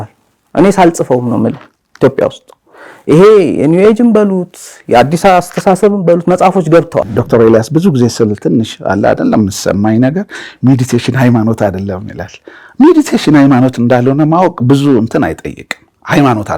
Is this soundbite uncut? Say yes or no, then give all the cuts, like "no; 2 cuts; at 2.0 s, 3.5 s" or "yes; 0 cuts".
no; 1 cut; at 7.2 s